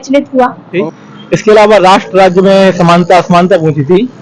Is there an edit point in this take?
yes; 2 cuts; at 0.8 s, 2.0 s

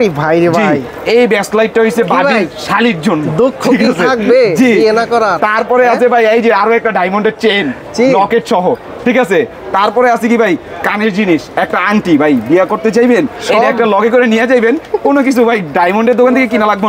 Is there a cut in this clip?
no; 0 cuts

